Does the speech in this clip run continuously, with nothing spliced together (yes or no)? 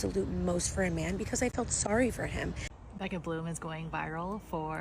no